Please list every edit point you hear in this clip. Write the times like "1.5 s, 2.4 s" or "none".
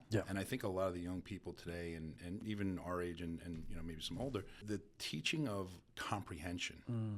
2.4 s, 4.6 s